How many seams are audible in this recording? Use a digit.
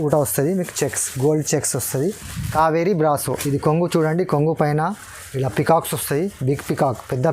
1